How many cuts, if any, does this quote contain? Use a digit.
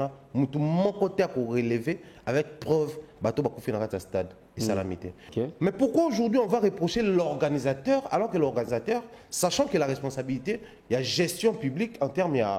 1